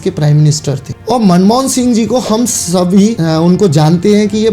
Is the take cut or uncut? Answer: cut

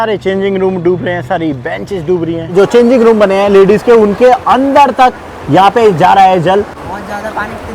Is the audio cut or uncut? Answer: cut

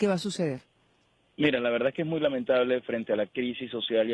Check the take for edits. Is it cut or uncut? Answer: cut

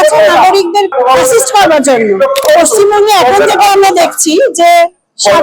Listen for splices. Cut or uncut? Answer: cut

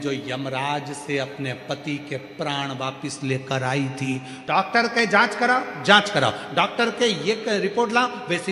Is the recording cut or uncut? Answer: cut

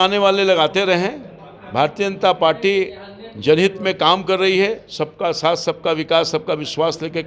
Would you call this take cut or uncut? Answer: uncut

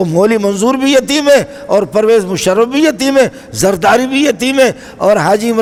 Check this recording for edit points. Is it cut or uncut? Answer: uncut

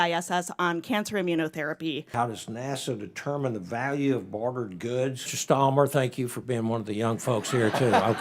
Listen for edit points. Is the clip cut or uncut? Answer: cut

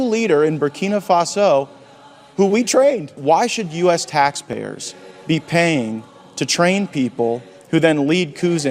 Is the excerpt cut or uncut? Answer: cut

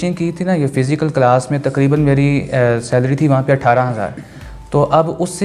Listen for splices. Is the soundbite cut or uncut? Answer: uncut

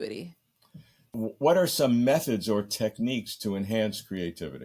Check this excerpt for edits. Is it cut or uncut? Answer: cut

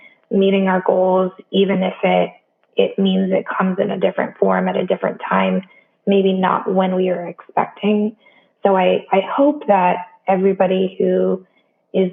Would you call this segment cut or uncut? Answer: uncut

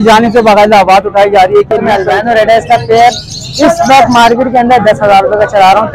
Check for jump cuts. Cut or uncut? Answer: cut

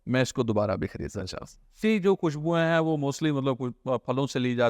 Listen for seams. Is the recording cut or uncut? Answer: cut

